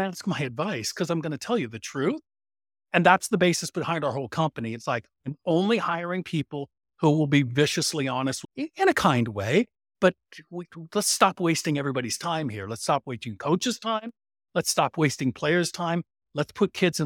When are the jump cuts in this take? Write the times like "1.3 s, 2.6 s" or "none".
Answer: 8.4 s